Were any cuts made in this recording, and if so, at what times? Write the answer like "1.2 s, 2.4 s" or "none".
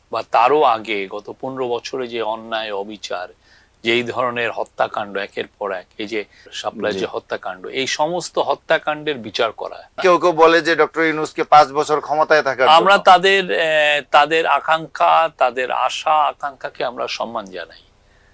6.5 s, 10.0 s